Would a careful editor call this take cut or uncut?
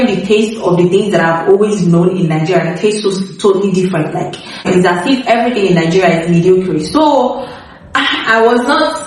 uncut